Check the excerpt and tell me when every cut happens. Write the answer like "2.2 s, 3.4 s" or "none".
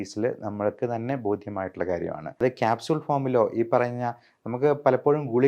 2.4 s